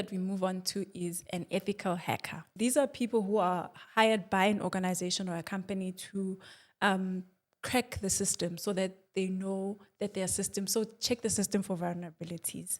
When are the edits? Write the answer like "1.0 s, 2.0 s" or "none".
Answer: 2.5 s

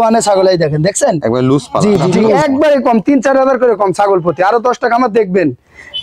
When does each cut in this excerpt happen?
2.2 s

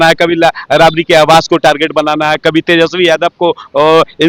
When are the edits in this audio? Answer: none

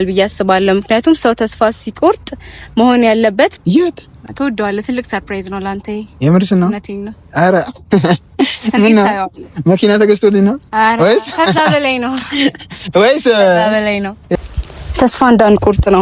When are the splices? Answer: 3.6 s, 14.2 s

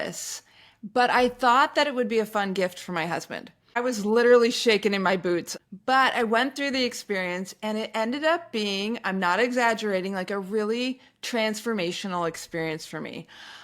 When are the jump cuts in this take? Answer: 3.8 s, 5.5 s

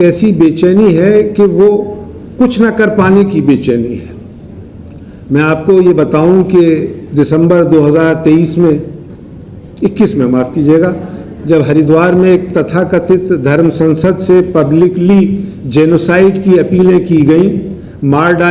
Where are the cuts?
none

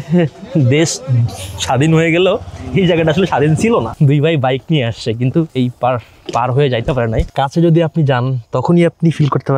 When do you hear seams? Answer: 3.9 s, 5.5 s, 7.3 s

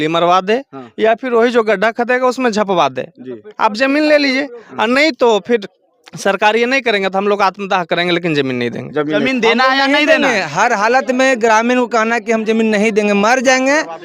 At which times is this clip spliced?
9.1 s

